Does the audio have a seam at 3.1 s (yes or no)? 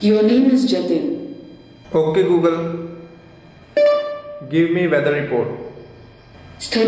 no